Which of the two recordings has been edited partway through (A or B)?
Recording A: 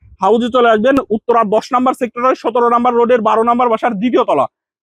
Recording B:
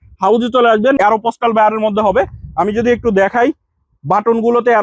B